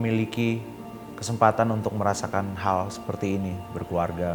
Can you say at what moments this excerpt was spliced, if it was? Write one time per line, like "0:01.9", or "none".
none